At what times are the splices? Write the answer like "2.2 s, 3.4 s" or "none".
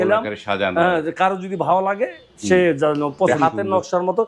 3.3 s